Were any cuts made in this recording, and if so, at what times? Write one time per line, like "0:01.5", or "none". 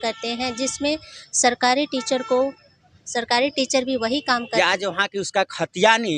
0:04.5